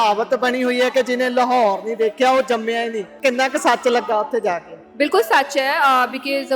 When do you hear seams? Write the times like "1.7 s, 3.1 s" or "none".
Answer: 3.2 s